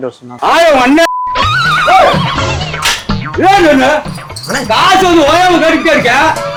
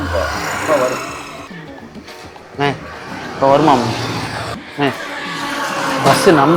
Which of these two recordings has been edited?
second; 1 cut; at 4.6 s

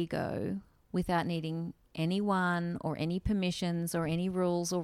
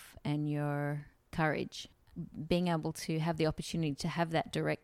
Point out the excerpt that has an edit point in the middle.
second; 2 cuts; at 1.2 s, 2.1 s

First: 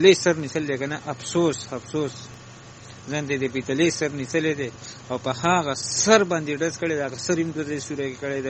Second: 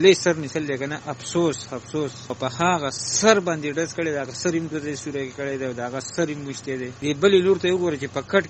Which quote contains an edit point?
second; 2 cuts; at 2.2 s, 6.9 s

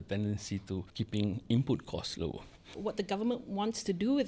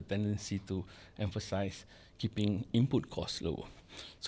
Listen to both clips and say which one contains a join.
first; 2 cuts; at 0.9 s, 2.7 s

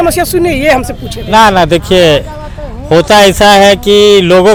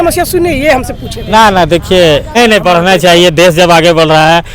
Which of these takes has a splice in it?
second; 1 cut; at 2.3 s

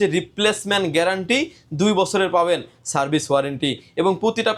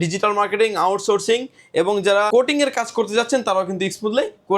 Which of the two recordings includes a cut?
second; 1 cut; at 2.3 s

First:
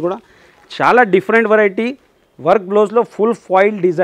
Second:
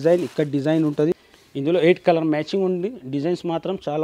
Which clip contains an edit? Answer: second; 1 cut; at 1.4 s

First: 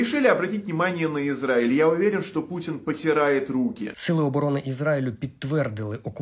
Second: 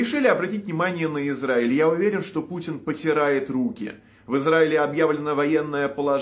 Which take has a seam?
first; 1 cut; at 3.9 s

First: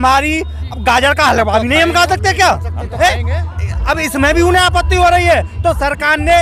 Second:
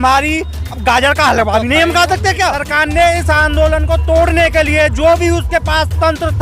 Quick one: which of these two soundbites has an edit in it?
second; 1 cut; at 2.6 s

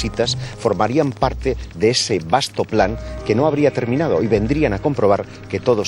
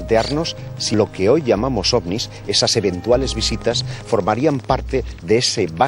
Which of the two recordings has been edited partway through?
second; 1 cut; at 0.9 s

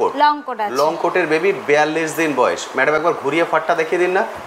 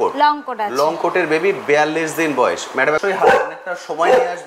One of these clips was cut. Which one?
second; 1 cut; at 3.0 s

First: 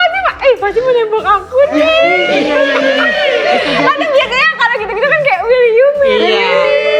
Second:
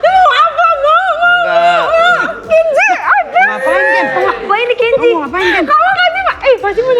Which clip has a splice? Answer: second; 1 cut; at 2.4 s

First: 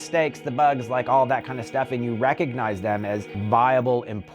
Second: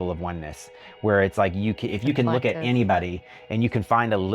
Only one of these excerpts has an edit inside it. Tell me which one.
first; 1 cut; at 3.4 s

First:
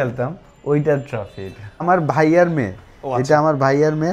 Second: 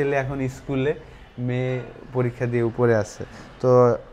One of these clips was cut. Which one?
first; 1 cut; at 1.8 s

